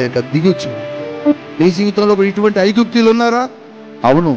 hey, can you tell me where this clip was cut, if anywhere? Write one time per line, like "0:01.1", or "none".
0:01.3